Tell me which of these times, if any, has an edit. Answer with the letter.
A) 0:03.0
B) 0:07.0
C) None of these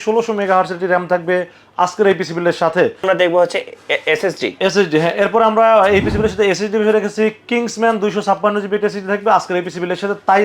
A